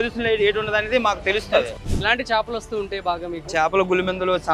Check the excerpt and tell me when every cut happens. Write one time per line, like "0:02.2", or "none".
0:01.7

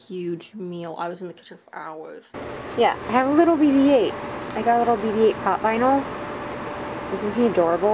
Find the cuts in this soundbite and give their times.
0:02.4

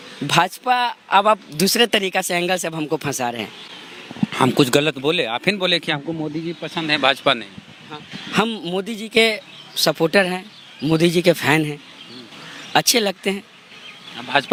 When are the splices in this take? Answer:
none

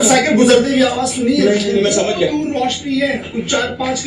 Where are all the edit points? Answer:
none

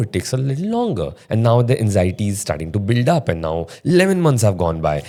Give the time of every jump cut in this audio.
none

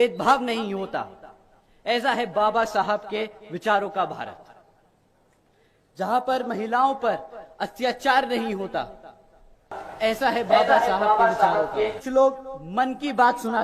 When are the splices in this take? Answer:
0:12.0

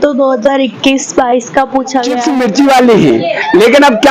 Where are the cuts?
0:02.1

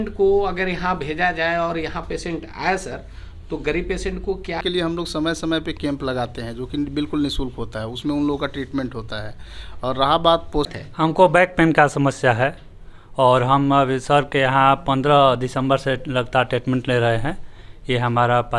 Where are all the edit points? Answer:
0:04.6
0:10.7

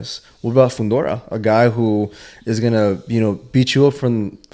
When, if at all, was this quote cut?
none

